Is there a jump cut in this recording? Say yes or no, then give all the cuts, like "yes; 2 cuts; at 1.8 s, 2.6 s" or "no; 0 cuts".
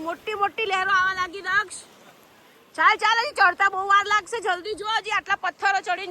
no; 0 cuts